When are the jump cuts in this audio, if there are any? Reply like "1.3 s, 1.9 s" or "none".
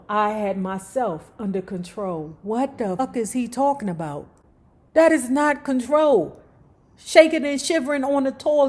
3.0 s